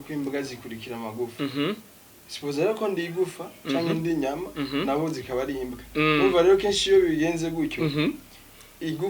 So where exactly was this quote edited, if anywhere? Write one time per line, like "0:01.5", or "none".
none